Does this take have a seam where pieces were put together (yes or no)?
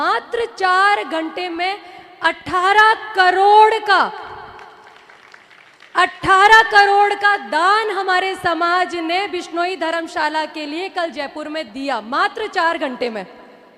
no